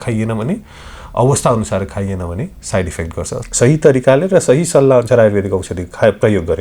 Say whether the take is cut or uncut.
cut